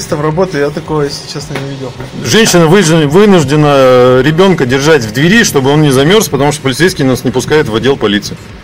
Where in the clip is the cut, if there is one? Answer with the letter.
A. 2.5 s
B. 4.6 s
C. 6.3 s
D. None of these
D